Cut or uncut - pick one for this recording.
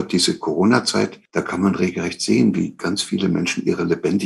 cut